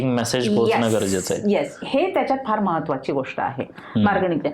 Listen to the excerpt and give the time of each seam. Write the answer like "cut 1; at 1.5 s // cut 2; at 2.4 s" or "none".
none